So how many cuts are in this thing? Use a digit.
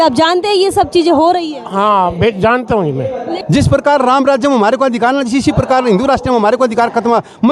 1